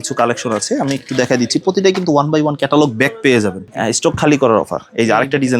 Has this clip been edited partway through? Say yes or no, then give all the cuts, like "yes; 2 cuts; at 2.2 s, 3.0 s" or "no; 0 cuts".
yes; 1 cut; at 3.6 s